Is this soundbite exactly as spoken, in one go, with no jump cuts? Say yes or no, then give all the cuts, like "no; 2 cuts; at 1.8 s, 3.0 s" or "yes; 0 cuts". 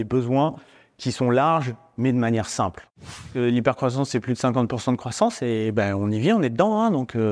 no; 1 cut; at 3.2 s